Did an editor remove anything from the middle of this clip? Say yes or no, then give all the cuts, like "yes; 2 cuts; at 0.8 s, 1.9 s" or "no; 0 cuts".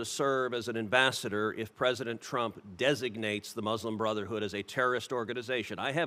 no; 0 cuts